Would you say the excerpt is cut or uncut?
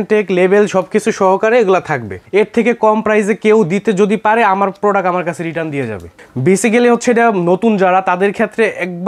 cut